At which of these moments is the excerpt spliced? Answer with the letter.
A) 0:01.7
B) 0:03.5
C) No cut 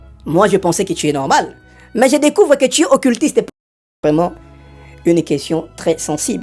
B